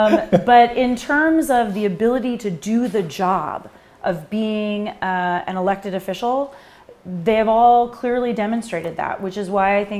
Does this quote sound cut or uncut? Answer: uncut